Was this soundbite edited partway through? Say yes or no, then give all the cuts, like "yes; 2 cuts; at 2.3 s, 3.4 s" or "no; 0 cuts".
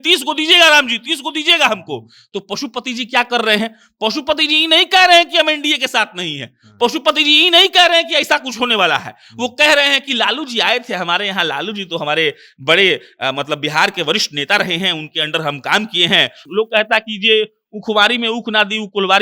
yes; 1 cut; at 16.5 s